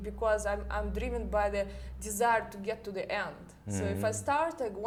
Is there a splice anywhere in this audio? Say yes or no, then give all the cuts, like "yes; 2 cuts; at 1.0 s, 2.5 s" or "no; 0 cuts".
no; 0 cuts